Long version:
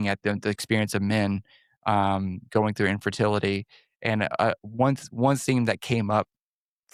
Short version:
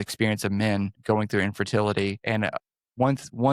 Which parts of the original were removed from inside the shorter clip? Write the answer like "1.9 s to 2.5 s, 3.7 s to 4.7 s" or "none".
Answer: 1.5 s to 2.4 s, 4.2 s to 4.5 s